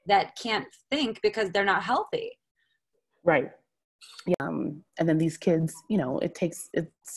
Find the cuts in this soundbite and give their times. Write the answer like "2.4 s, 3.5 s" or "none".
4.3 s